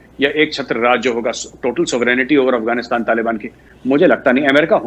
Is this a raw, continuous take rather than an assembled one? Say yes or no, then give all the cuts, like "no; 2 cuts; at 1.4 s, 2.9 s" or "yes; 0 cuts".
yes; 0 cuts